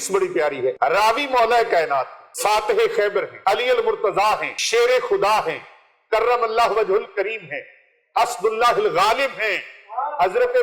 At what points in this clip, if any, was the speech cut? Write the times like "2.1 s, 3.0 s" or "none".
0.8 s, 2.2 s, 3.3 s, 4.5 s